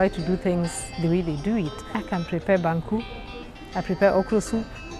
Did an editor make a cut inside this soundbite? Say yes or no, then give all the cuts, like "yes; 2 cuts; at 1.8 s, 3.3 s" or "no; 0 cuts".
yes; 1 cut; at 1.8 s